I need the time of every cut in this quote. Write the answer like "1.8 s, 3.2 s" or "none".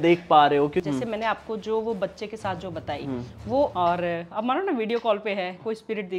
0.8 s, 3.7 s